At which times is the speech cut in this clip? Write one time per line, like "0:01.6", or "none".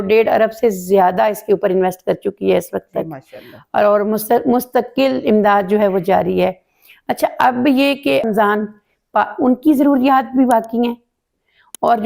none